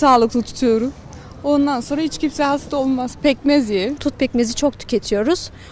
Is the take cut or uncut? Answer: cut